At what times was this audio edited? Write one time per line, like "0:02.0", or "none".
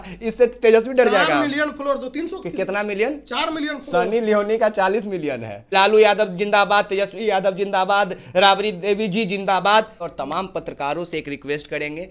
0:05.6
0:10.0